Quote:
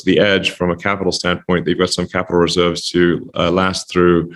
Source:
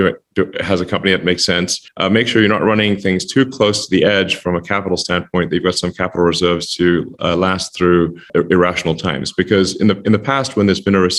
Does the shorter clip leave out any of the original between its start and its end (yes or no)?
no